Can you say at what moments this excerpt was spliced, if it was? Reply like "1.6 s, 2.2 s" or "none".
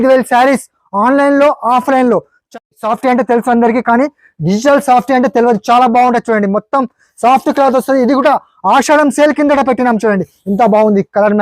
2.4 s